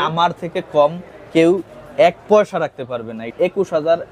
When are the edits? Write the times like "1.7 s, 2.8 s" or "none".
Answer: 3.2 s